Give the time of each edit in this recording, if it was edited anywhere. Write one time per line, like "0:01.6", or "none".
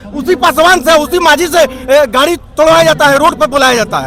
none